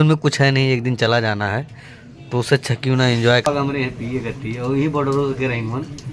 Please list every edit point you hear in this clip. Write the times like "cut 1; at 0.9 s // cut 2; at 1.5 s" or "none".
cut 1; at 3.5 s